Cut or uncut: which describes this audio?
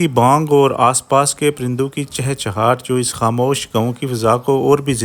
uncut